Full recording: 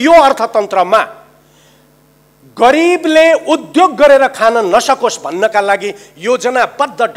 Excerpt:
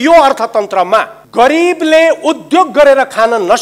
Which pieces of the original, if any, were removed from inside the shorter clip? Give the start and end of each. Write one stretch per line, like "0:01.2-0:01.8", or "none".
0:01.2-0:02.4